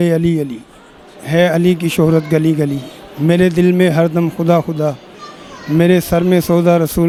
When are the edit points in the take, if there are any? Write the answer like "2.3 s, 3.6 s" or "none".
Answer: none